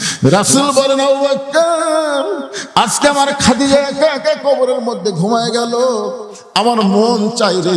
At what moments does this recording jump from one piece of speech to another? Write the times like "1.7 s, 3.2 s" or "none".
none